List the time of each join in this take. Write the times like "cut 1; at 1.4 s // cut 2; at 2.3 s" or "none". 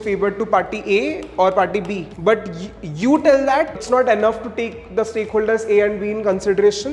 cut 1; at 2.1 s // cut 2; at 3.8 s

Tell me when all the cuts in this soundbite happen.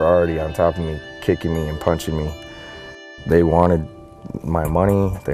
cut 1; at 3.0 s

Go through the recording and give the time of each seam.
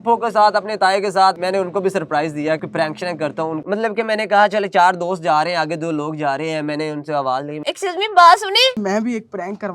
cut 1; at 1.4 s // cut 2; at 2.6 s // cut 3; at 3.6 s // cut 4; at 7.6 s // cut 5; at 8.8 s

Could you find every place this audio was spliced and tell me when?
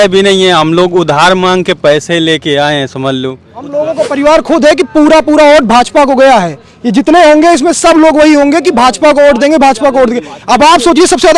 cut 1; at 3.6 s

